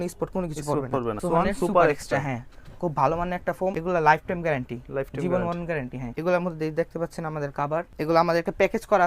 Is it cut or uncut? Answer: cut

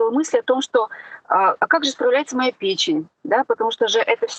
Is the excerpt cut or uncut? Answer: uncut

